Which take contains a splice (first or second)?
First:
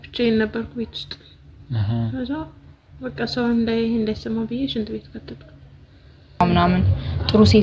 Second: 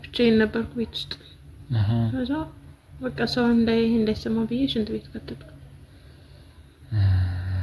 first